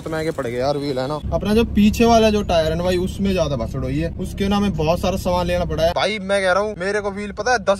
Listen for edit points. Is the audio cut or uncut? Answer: cut